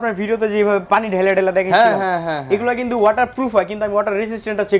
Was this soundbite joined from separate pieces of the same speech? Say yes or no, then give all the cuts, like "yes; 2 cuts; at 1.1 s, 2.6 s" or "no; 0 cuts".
no; 0 cuts